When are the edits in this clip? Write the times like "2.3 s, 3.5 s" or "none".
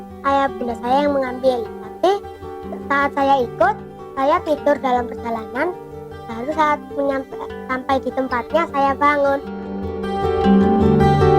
9.7 s